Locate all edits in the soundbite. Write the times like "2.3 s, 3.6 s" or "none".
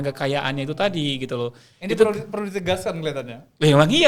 none